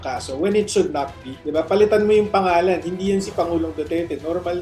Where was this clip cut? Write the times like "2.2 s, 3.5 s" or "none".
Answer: 1.4 s